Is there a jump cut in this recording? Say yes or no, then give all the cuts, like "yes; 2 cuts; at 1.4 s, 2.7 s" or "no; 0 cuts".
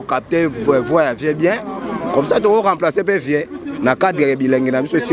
no; 0 cuts